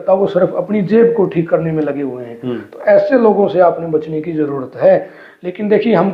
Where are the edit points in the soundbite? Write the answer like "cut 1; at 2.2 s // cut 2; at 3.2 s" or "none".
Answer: none

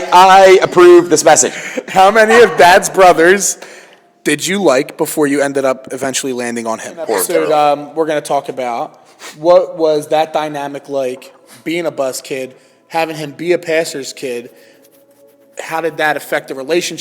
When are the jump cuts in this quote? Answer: cut 1; at 7.3 s

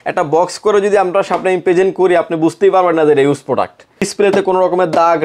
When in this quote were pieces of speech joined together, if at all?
cut 1; at 4.1 s

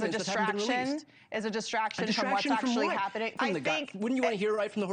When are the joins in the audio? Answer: cut 1; at 3.3 s

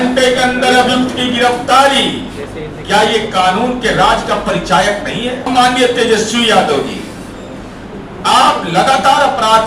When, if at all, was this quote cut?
cut 1; at 5.5 s

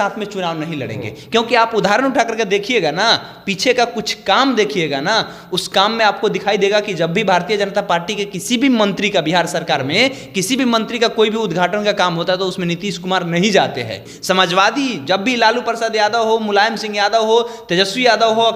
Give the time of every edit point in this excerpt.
cut 1; at 14.1 s

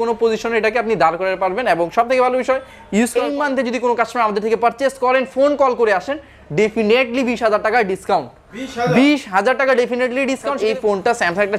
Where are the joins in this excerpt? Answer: cut 1; at 3.1 s // cut 2; at 10.6 s

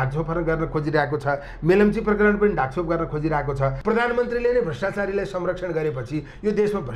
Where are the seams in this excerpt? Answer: cut 1; at 3.8 s

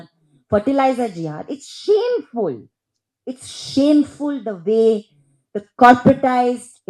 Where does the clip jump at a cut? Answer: none

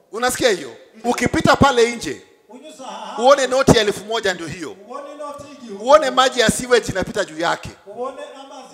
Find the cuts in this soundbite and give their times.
cut 1; at 1.0 s

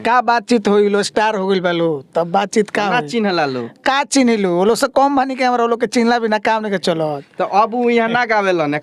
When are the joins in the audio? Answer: none

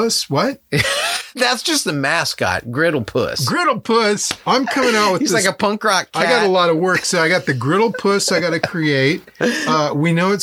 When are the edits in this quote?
none

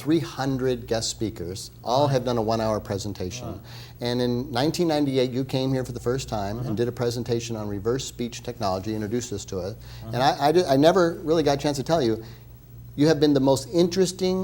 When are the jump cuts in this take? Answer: cut 1; at 3.1 s

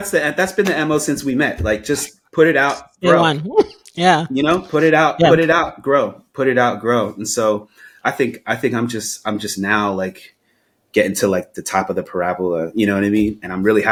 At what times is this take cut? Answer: none

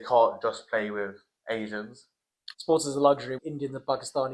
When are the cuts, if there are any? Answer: cut 1; at 2.3 s // cut 2; at 3.3 s

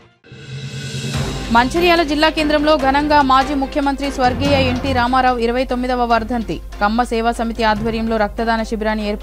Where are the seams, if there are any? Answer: cut 1; at 1.5 s

